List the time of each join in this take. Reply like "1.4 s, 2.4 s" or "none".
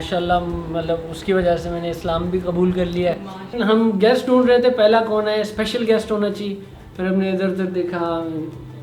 3.6 s